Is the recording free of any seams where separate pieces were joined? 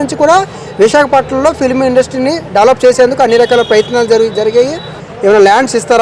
no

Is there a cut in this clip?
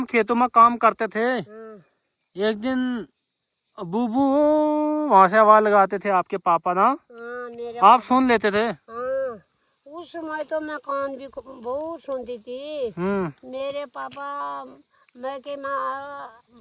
no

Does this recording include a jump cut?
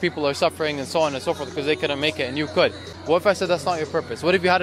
yes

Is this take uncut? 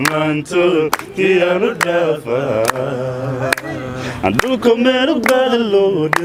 yes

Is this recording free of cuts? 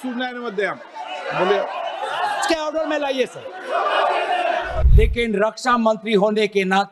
no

